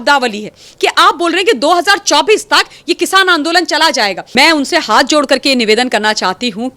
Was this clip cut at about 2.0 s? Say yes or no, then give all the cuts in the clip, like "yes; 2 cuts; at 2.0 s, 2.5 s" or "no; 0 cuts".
no; 1 cut; at 4.2 s